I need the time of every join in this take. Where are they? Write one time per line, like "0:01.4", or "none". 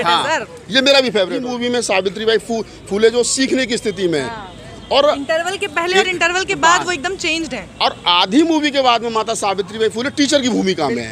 0:01.4